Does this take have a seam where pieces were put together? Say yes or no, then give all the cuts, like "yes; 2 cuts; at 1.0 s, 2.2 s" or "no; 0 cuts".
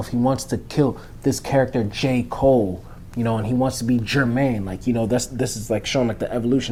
no; 0 cuts